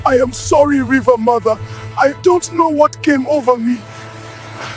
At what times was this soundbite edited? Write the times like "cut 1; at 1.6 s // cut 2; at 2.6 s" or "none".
none